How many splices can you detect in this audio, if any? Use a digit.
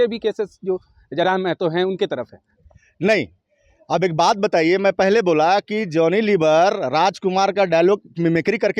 0